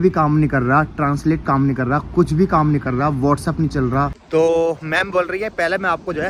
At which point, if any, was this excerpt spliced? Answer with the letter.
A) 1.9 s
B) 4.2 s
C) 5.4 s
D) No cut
B